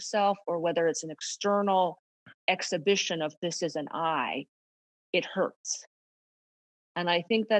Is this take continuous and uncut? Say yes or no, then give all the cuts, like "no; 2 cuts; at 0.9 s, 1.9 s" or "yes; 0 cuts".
yes; 0 cuts